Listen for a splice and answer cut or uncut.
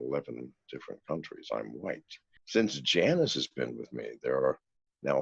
cut